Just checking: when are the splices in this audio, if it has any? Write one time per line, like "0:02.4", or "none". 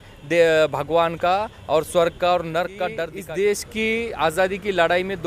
0:03.1

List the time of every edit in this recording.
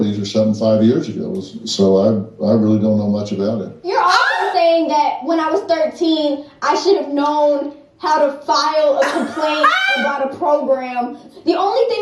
none

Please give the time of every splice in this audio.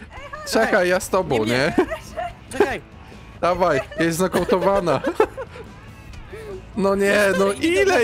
none

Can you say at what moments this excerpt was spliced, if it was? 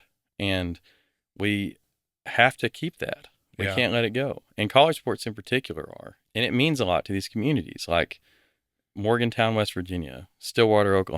0:06.2

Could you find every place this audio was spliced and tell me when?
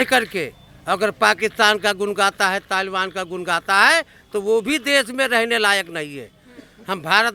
none

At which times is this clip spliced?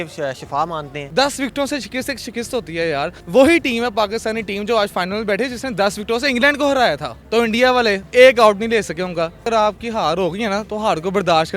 0:01.0
0:09.4

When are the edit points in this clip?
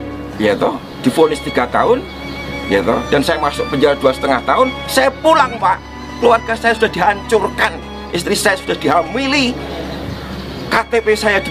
none

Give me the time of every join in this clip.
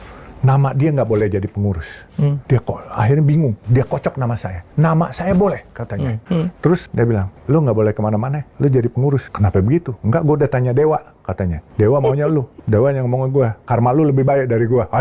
0:02.4
0:03.6
0:04.5
0:06.2
0:07.0
0:08.4
0:09.3
0:11.6
0:12.6

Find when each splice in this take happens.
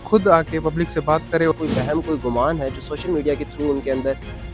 0:01.5

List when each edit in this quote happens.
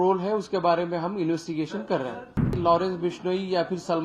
0:02.5

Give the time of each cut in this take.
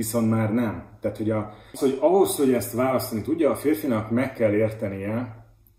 0:01.6

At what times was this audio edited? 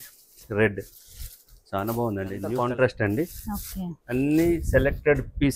0:02.5

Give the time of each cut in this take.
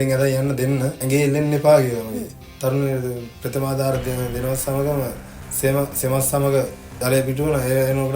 0:01.0
0:02.4

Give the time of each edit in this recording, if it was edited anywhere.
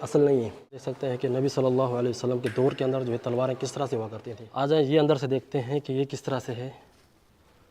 0:00.9
0:04.6

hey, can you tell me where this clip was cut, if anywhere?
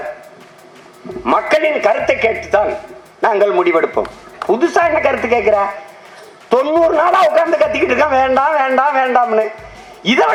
none

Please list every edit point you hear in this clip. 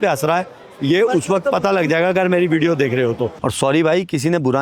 0:03.4

